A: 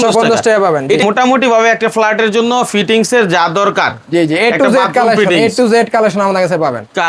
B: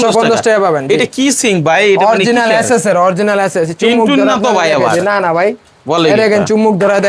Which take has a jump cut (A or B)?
A